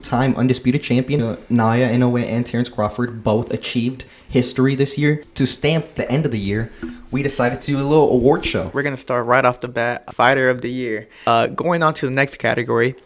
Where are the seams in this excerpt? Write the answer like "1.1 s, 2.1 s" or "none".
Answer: 1.3 s, 5.4 s, 8.7 s, 10.1 s, 11.3 s